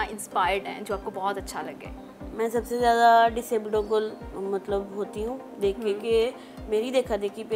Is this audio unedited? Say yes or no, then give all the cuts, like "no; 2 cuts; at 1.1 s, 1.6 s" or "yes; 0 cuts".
yes; 0 cuts